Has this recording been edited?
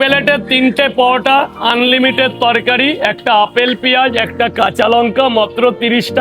no; 0 cuts

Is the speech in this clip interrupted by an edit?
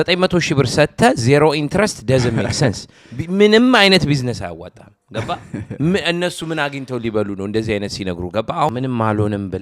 yes; 1 cut; at 8.7 s

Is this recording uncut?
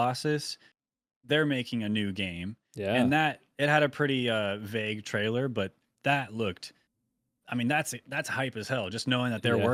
yes; 0 cuts

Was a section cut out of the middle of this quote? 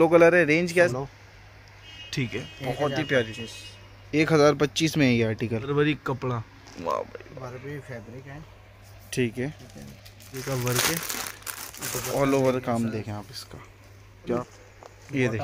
yes; 4 cuts; at 0.9 s, 5.7 s, 10.4 s, 14.5 s

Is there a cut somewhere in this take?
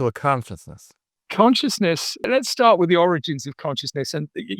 yes; 2 cuts; at 1.2 s, 2.2 s

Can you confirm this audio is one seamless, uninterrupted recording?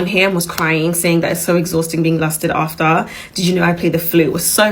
yes; 0 cuts

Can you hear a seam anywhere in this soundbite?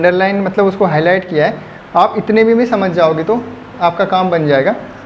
no; 0 cuts

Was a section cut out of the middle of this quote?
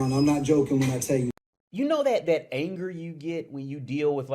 yes; 1 cut; at 1.3 s

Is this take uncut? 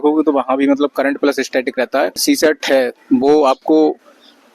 no; 1 cut; at 2.2 s

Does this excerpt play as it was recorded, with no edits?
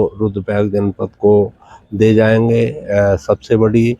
yes; 0 cuts

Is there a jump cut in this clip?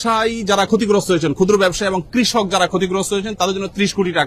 no; 0 cuts

